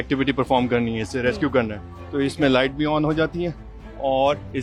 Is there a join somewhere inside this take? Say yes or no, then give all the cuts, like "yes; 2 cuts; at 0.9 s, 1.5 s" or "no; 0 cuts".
no; 0 cuts